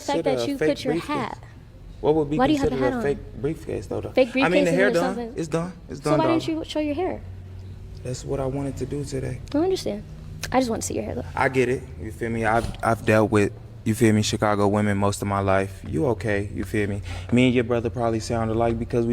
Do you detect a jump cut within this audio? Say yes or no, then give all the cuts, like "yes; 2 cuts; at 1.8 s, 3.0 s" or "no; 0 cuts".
yes; 2 cuts; at 6.2 s, 17.9 s